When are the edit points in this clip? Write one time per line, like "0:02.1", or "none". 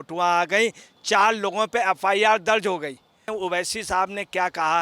0:03.3